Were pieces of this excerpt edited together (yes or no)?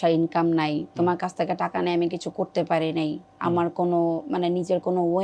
no